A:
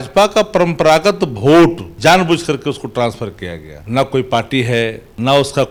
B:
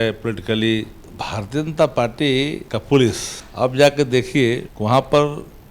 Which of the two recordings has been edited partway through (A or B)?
B